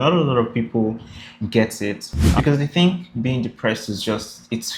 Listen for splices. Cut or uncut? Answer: cut